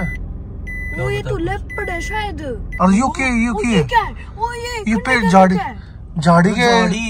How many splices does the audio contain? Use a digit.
1